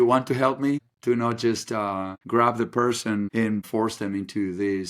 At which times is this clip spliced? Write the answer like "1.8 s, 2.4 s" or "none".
0.9 s, 2.1 s, 3.5 s